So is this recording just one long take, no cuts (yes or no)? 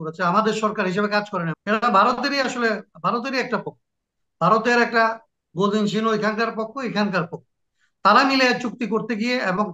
no